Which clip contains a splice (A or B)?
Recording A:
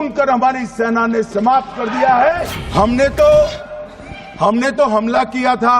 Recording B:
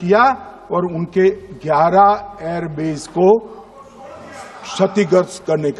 A